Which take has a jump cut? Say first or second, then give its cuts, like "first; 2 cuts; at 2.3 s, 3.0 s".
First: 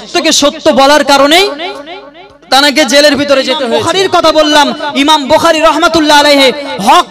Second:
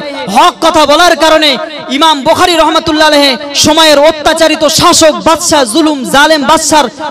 first; 1 cut; at 3.7 s